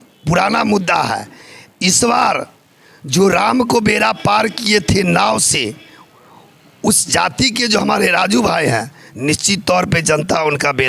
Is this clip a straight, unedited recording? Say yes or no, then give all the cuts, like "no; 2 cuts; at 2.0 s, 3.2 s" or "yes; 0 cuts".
yes; 0 cuts